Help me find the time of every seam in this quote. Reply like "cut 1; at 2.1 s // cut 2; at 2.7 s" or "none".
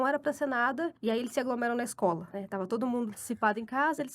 cut 1; at 1.0 s // cut 2; at 2.3 s